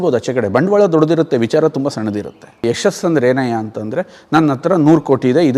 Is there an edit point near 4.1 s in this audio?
no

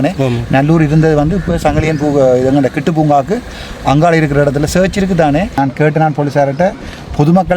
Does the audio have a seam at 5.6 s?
yes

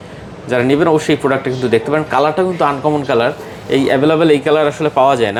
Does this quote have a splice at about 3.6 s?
no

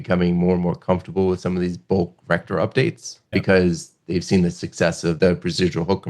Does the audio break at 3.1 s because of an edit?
yes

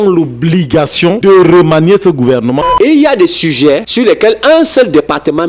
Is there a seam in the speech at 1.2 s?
yes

